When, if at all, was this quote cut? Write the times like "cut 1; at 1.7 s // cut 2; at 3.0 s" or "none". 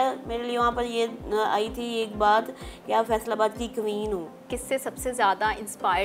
cut 1; at 4.4 s